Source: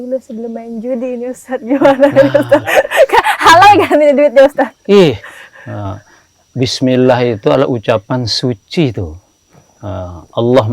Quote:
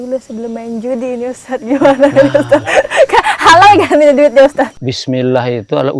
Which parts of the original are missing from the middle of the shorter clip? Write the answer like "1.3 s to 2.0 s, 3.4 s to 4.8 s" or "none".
4.8 s to 6.5 s